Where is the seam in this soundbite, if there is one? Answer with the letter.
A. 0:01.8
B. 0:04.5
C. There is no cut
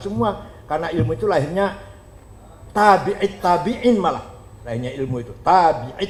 C